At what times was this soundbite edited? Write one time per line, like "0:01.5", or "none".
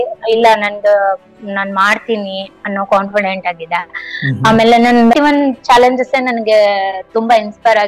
0:05.1